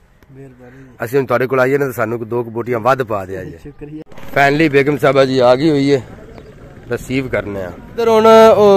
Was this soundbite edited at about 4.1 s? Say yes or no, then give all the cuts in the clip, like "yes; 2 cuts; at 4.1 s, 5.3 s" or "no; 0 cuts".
yes; 2 cuts; at 4.1 s, 8.0 s